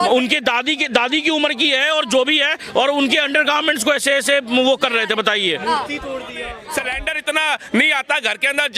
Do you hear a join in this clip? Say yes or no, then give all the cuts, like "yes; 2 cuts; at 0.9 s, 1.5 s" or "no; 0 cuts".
yes; 1 cut; at 6.6 s